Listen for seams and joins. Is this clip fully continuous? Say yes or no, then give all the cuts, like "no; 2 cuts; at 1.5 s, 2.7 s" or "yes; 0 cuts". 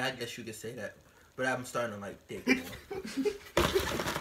yes; 0 cuts